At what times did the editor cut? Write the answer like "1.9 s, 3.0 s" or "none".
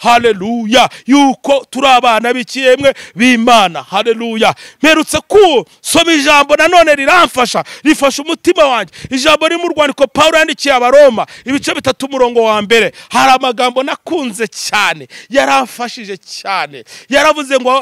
none